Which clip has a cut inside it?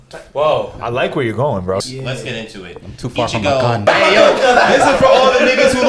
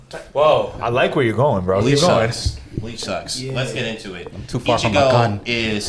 first; 2 cuts; at 1.8 s, 3.9 s

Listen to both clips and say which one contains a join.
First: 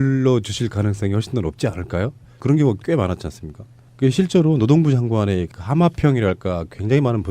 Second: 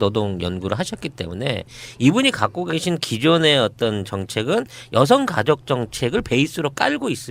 first; 1 cut; at 4.0 s

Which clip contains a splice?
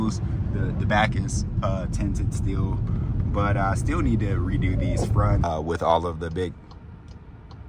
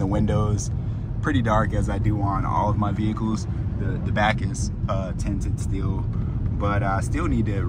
first; 1 cut; at 5.4 s

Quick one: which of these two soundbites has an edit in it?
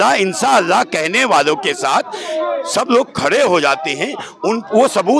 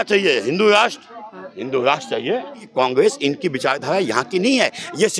second; 1 cut; at 2.7 s

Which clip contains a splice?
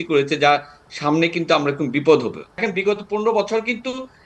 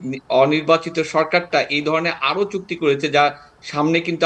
first; 1 cut; at 2.6 s

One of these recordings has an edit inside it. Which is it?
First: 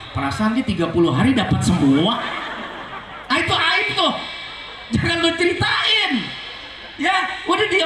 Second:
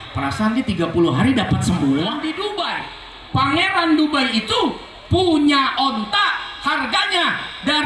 second; 1 cut; at 2.2 s

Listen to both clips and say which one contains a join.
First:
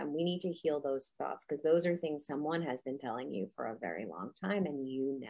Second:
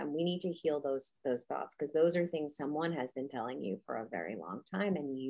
first; 1 cut; at 1.1 s

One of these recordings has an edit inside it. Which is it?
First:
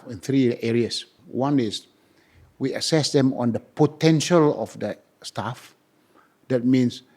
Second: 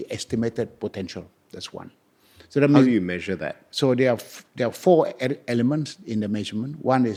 first; 1 cut; at 1.1 s

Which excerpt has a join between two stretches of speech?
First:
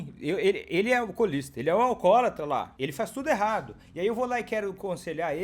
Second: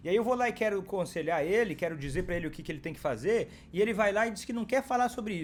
first; 1 cut; at 2.8 s

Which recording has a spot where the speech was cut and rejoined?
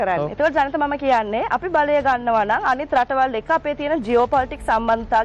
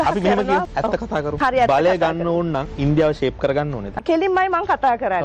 second; 3 cuts; at 0.9 s, 2.7 s, 3.9 s

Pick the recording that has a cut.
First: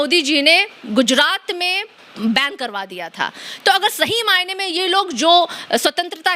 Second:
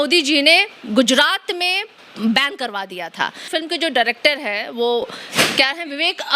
second; 1 cut; at 3.4 s

